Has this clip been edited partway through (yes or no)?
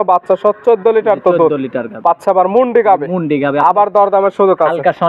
no